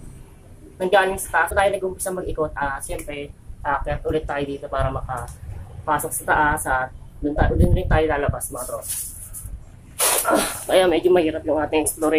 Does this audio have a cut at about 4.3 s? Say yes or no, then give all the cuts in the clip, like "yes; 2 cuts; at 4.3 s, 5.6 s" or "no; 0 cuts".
no; 1 cut; at 1.5 s